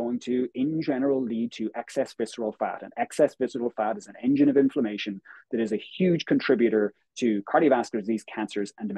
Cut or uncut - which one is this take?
uncut